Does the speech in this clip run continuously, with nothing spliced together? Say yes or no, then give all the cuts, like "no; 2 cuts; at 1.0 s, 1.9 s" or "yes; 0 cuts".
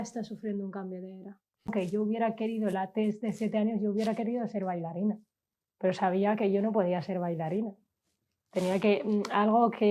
no; 1 cut; at 1.7 s